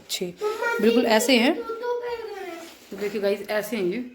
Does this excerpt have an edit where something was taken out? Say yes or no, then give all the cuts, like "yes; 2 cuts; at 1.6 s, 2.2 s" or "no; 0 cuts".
yes; 1 cut; at 2.8 s